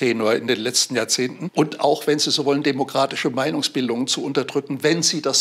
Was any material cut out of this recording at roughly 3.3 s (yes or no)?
no